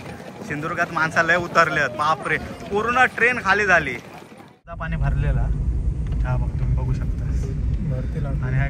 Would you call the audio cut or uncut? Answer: cut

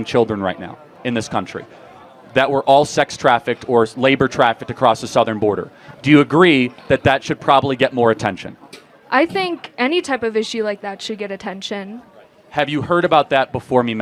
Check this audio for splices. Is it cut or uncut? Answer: uncut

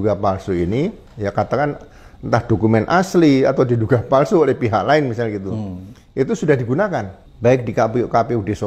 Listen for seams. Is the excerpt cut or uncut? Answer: cut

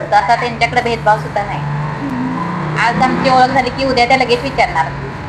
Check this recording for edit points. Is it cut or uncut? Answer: uncut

